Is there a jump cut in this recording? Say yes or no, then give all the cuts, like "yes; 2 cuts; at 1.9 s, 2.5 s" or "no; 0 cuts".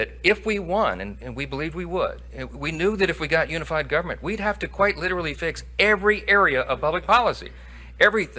no; 0 cuts